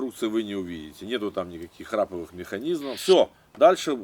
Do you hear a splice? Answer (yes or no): yes